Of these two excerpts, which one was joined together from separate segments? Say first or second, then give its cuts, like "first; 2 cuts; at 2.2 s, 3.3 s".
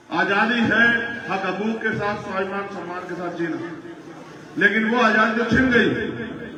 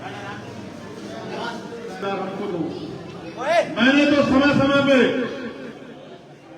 second; 1 cut; at 2.0 s